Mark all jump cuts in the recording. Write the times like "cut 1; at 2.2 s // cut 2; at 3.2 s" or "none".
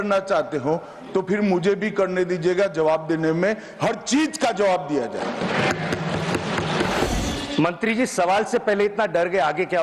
cut 1; at 7.1 s